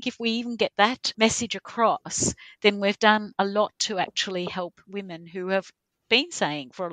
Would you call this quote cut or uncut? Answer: cut